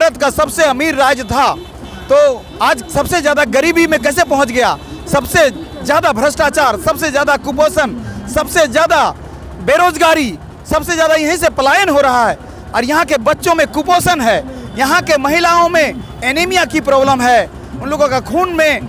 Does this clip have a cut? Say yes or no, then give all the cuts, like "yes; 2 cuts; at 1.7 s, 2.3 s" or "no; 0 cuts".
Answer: no; 0 cuts